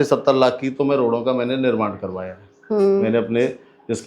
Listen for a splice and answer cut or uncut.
uncut